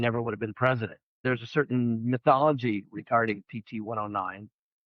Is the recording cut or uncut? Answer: cut